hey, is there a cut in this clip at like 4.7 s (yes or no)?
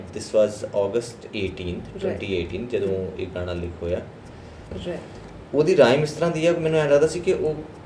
yes